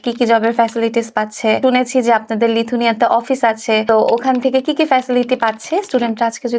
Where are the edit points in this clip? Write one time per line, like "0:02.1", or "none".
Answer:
0:01.6
0:03.8